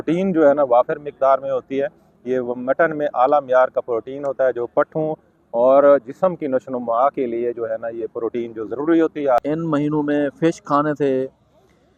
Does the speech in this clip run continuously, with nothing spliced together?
no; 1 cut; at 9.5 s

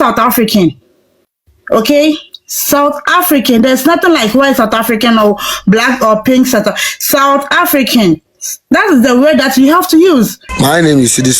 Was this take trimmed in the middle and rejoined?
yes; 1 cut; at 10.4 s

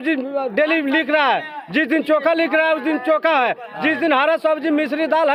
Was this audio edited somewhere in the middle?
no; 0 cuts

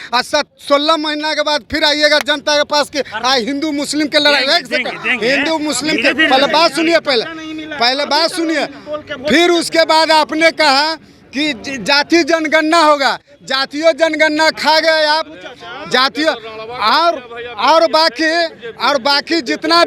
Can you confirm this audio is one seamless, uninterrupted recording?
yes; 0 cuts

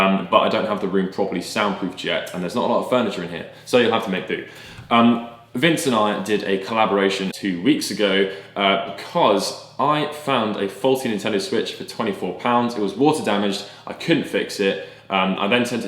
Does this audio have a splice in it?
yes; 1 cut; at 7.3 s

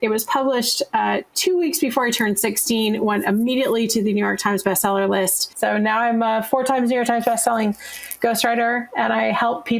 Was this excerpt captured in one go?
no; 1 cut; at 5.4 s

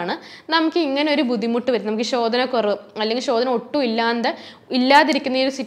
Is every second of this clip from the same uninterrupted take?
yes; 0 cuts

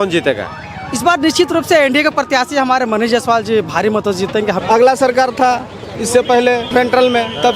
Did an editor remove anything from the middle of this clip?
yes; 2 cuts; at 4.6 s, 6.7 s

